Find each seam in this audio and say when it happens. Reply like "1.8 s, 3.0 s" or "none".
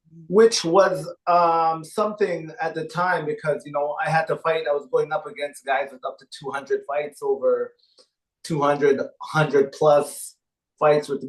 none